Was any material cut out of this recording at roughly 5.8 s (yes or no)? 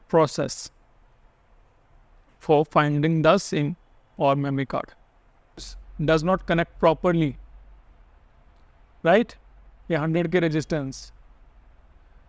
yes